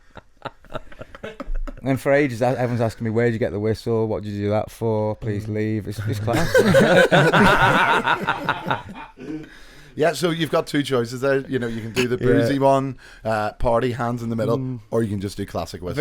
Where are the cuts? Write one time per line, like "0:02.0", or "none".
none